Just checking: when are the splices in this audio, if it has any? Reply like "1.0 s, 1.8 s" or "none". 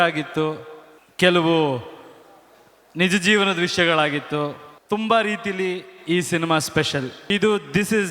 7.2 s